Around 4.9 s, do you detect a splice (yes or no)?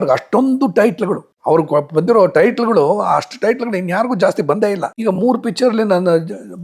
yes